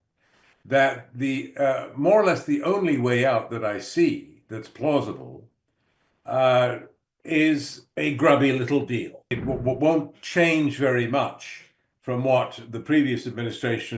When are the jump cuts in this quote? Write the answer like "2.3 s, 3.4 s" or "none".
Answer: 9.3 s